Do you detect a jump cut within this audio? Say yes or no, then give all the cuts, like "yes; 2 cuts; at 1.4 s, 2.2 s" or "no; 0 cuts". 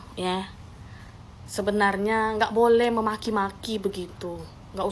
no; 0 cuts